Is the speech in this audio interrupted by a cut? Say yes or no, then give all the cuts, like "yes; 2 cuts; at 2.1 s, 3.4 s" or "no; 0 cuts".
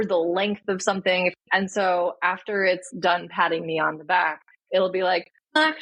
yes; 1 cut; at 1.3 s